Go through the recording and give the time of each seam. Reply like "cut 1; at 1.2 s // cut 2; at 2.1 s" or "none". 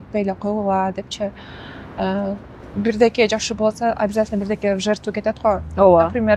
none